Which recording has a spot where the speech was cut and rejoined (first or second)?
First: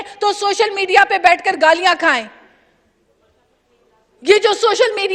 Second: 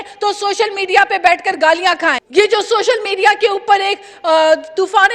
second